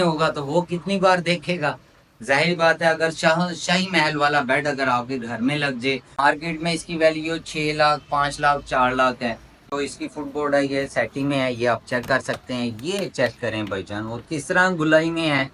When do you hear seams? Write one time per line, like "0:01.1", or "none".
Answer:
none